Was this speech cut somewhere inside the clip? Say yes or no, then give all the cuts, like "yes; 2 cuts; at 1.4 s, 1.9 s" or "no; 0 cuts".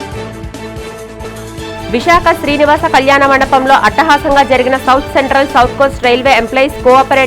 yes; 1 cut; at 1.2 s